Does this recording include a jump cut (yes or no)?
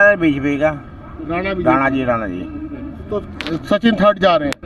no